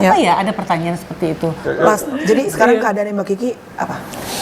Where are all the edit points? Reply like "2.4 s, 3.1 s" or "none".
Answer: 1.6 s